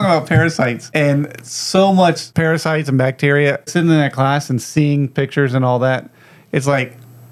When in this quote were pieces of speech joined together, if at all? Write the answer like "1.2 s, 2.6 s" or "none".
0.8 s, 2.3 s, 3.7 s